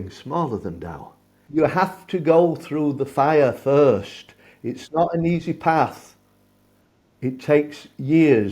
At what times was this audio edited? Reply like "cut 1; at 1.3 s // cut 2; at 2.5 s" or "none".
cut 1; at 1.4 s